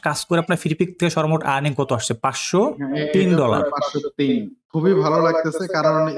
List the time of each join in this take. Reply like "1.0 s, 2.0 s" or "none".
4.6 s